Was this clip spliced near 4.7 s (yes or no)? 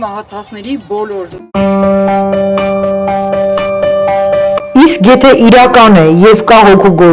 no